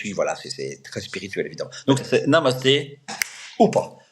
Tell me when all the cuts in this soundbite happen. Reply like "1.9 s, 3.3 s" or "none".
2.0 s